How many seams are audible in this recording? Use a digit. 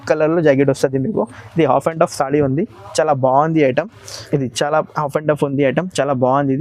0